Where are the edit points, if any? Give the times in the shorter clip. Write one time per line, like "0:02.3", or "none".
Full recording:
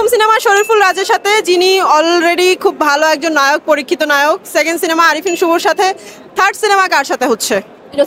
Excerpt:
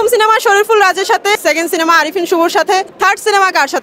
0:01.4
0:02.9